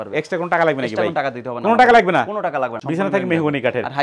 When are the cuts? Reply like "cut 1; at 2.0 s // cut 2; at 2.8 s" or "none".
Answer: cut 1; at 2.8 s